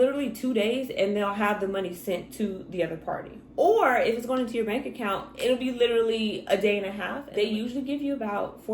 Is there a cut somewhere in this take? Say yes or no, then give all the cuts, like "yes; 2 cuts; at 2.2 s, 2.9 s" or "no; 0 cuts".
yes; 1 cut; at 7.2 s